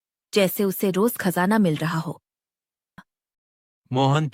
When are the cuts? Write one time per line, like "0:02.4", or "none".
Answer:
0:03.0